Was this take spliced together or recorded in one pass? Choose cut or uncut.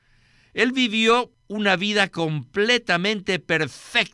cut